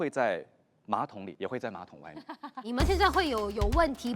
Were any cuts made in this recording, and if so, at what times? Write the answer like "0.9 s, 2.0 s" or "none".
1.2 s, 2.6 s